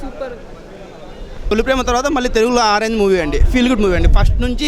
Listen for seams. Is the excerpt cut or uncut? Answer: cut